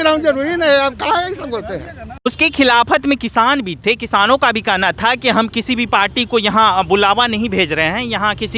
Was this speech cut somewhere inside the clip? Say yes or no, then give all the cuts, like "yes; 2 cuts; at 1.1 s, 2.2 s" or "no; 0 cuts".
yes; 1 cut; at 2.3 s